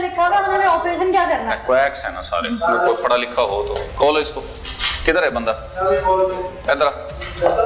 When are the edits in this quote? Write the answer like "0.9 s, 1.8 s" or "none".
none